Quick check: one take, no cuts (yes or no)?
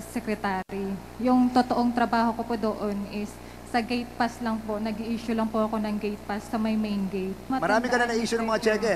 no